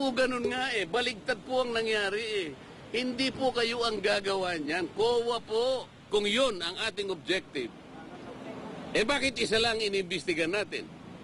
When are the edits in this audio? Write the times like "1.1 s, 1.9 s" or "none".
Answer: 6.1 s